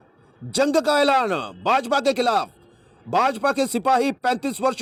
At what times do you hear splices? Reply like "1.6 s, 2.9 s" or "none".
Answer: none